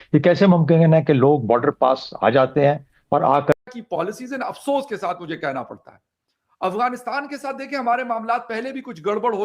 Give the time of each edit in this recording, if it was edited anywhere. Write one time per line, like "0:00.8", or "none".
0:03.7